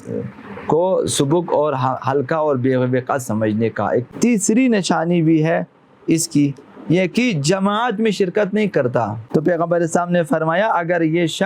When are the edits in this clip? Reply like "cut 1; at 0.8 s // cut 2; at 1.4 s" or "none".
cut 1; at 4.1 s // cut 2; at 9.2 s